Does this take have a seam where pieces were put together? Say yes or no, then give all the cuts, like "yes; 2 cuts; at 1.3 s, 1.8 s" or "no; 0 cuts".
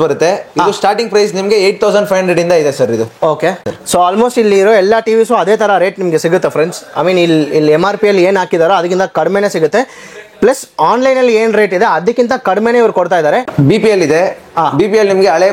yes; 2 cuts; at 3.7 s, 13.6 s